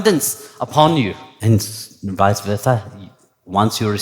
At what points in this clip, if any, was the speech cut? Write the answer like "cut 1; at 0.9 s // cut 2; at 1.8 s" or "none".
cut 1; at 1.3 s